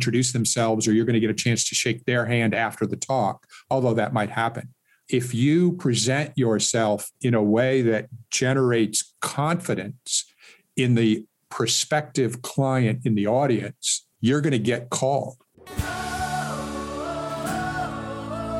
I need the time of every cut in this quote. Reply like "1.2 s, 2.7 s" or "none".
15.5 s

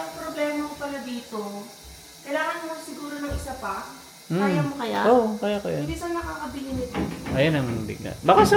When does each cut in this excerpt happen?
none

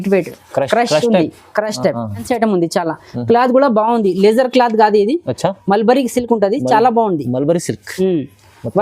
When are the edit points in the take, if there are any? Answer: 2.3 s

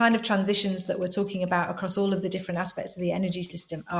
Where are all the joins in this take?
none

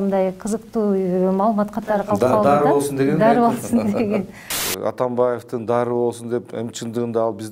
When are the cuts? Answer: 4.6 s

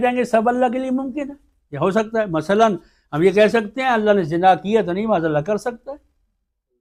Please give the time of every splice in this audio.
none

